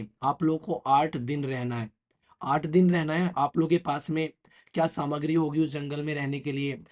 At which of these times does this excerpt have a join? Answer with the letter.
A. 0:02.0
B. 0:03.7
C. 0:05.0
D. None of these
D